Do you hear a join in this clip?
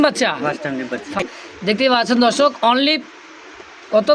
yes; 1 cut; at 1.2 s

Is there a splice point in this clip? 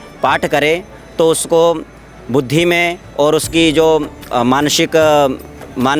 no; 0 cuts

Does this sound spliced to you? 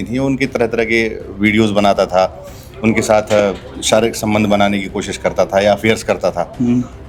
no; 0 cuts

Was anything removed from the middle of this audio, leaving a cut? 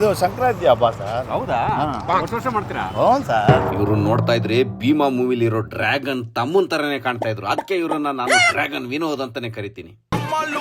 yes; 1 cut; at 3.7 s

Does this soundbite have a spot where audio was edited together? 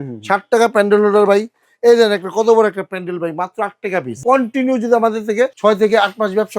yes; 2 cuts; at 4.1 s, 5.5 s

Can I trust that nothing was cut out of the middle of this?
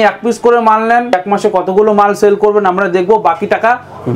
no; 1 cut; at 1.1 s

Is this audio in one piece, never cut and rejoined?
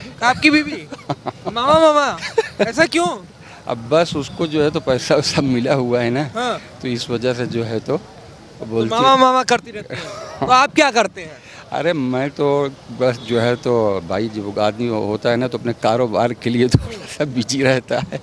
yes; 0 cuts

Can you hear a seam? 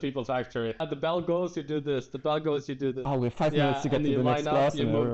yes; 2 cuts; at 0.8 s, 3.0 s

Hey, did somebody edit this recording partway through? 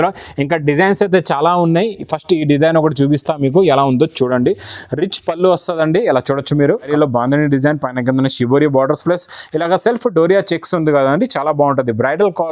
yes; 1 cut; at 6.9 s

